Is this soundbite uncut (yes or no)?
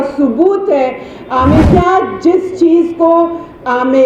no